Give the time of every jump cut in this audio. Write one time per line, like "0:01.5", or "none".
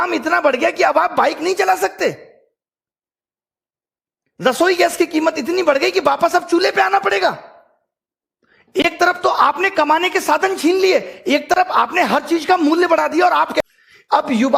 0:13.6